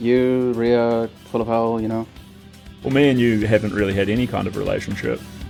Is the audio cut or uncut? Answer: uncut